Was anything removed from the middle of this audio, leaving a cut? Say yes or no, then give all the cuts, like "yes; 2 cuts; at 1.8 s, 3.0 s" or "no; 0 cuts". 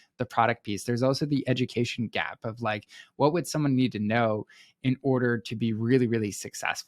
no; 0 cuts